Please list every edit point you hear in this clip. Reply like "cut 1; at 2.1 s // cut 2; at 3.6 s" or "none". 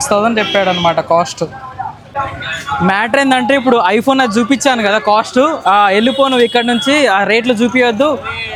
none